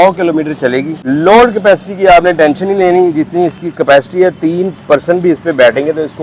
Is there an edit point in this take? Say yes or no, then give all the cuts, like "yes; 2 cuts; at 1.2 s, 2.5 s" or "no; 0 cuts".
yes; 1 cut; at 1.0 s